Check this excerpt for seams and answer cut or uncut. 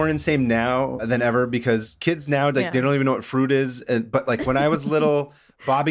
cut